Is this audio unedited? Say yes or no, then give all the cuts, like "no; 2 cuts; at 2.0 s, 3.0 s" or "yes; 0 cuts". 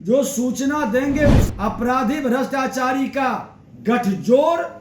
no; 1 cut; at 1.4 s